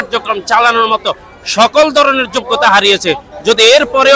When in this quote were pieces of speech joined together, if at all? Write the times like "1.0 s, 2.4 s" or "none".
none